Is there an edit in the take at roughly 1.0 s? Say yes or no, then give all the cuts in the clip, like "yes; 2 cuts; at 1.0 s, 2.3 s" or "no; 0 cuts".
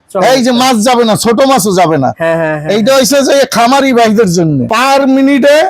no; 1 cut; at 4.7 s